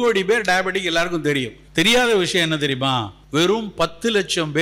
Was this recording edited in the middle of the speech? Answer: yes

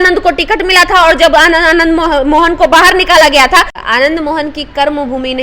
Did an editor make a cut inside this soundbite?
yes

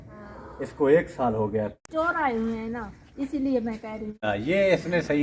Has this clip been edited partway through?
yes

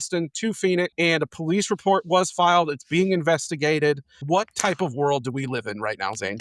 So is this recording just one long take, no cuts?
no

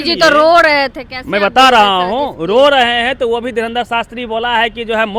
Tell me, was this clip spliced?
no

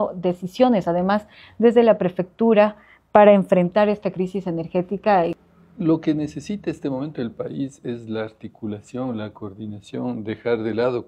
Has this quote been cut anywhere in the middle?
yes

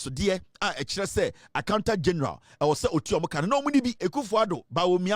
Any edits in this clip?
yes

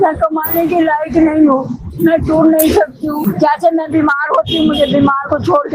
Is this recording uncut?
no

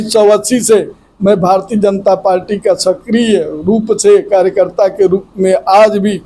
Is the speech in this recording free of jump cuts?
yes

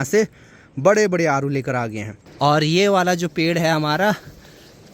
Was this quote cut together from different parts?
yes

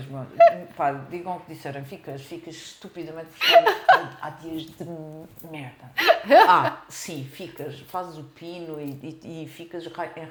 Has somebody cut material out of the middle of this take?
no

